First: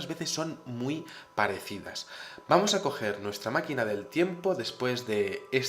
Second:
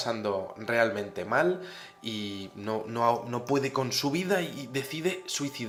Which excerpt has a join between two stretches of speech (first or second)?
first